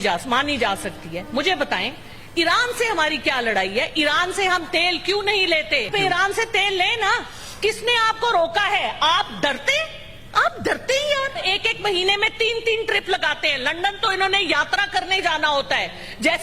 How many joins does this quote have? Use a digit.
2